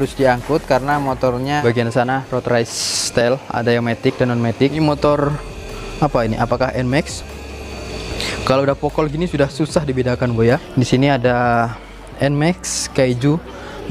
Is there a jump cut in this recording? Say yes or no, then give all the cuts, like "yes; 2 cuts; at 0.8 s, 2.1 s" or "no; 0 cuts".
yes; 3 cuts; at 1.6 s, 4.8 s, 10.7 s